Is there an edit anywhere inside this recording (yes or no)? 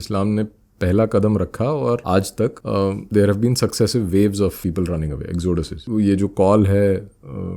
yes